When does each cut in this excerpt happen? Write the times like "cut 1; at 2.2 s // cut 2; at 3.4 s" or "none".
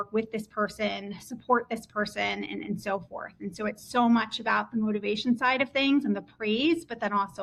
none